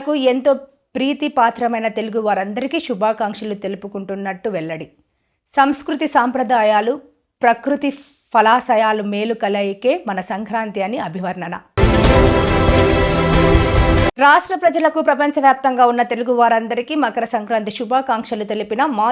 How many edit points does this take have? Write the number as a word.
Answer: zero